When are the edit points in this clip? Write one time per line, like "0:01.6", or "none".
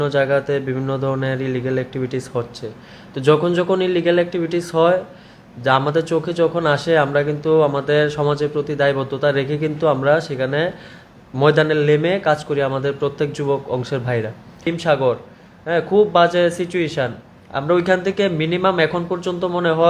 0:14.6